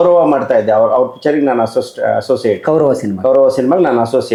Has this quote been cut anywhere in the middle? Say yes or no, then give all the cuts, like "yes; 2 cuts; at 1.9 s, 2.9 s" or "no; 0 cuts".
no; 0 cuts